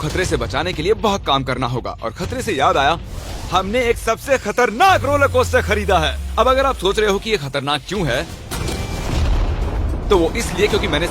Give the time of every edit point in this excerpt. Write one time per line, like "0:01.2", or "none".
none